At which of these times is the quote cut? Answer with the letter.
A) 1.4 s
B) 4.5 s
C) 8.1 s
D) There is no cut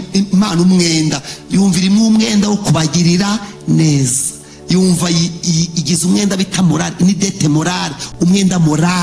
D